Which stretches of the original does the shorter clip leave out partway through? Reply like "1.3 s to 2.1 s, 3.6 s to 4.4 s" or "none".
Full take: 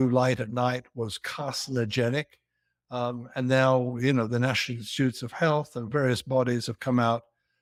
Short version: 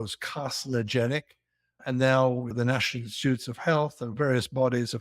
2.8 s to 3.2 s, 4.0 s to 4.3 s

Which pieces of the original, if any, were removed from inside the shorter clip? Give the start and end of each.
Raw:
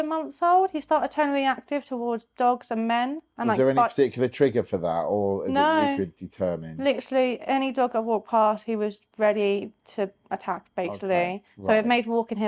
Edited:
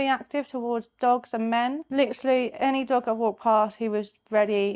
3.2 s to 6.7 s

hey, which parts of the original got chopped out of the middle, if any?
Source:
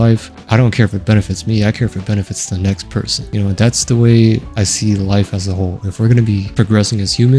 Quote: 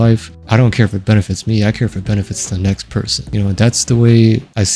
none

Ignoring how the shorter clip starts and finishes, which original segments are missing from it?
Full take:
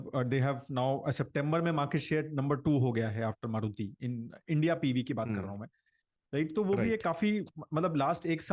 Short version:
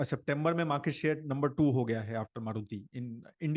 none

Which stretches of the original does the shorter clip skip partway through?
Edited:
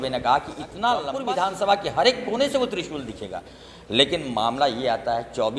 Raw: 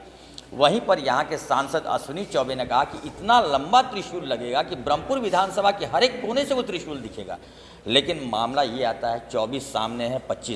3.6 s to 5.1 s

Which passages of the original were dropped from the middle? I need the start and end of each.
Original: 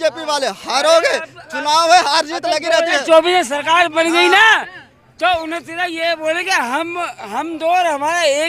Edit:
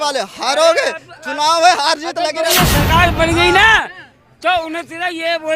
2.8 s to 3.3 s

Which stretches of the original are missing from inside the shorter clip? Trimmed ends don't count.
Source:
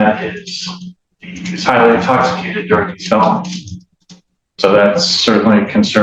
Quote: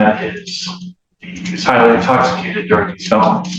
none

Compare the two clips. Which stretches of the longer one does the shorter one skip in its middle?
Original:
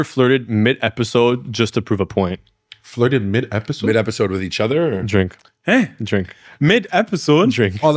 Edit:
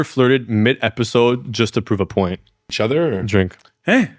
2.7 s to 4.5 s

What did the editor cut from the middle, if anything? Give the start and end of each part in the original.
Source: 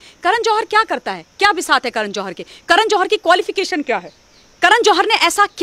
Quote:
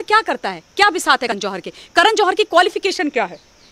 1.9 s to 2.0 s

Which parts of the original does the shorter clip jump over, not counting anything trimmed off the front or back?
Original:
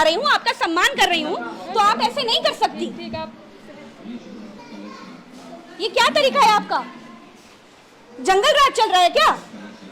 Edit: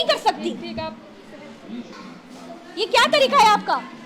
4.3 s to 5.0 s

